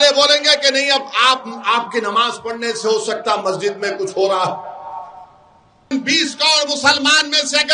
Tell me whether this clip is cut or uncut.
cut